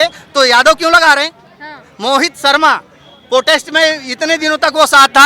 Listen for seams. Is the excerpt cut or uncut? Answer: uncut